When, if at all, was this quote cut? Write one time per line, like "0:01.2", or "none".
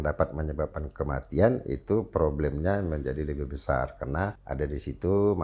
0:04.4

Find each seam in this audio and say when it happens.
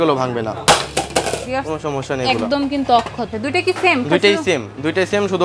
0:03.3

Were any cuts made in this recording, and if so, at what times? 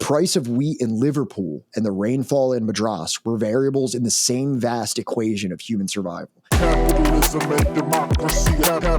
0:06.4

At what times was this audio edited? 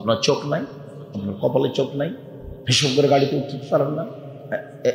none

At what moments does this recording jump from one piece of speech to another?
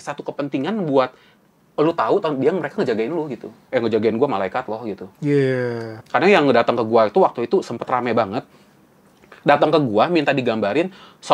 0:03.5
0:06.0

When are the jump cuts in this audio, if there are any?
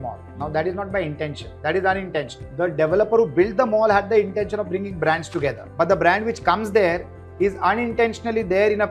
0:01.5
0:02.4
0:05.6

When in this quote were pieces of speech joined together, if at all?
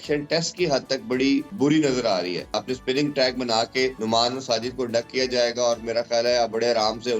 0:01.5
0:02.6
0:04.0

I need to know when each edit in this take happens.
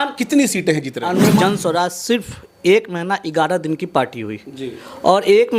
0:01.4

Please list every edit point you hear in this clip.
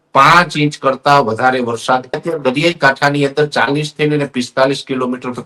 0:02.2

